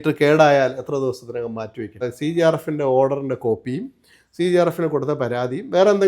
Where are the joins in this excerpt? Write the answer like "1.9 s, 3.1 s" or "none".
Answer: 2.1 s